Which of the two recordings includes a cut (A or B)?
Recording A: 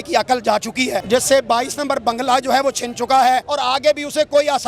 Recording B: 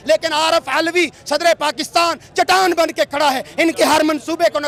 A